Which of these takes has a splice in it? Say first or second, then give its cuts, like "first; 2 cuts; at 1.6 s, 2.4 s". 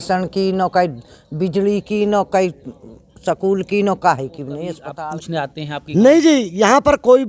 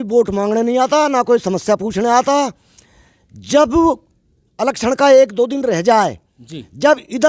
first; 1 cut; at 4.8 s